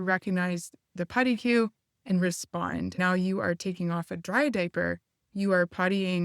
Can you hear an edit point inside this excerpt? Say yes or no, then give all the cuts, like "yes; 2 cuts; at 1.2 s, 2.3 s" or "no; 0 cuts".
yes; 1 cut; at 3.0 s